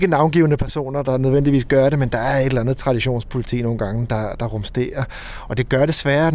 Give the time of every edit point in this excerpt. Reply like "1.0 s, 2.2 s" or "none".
none